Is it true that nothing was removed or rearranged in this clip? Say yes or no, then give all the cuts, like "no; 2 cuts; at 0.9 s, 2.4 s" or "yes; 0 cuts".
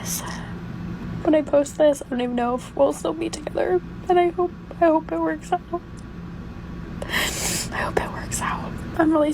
no; 1 cut; at 1.1 s